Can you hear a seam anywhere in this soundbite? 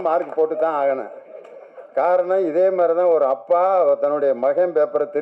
no; 0 cuts

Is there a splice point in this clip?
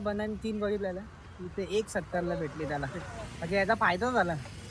no; 0 cuts

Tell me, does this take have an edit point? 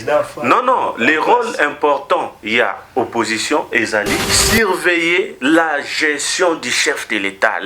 yes; 1 cut; at 4.3 s

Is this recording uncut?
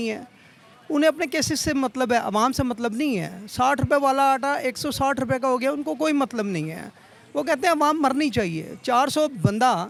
yes; 0 cuts

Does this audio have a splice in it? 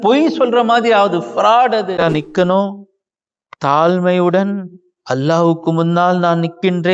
yes; 1 cut; at 1.9 s

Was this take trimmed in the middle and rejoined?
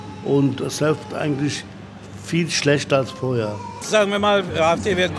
yes; 1 cut; at 3.8 s

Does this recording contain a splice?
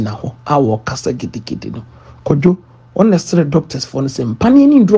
no; 0 cuts

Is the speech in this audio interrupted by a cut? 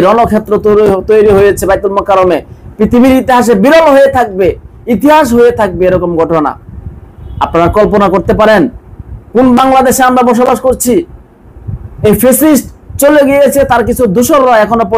no; 0 cuts

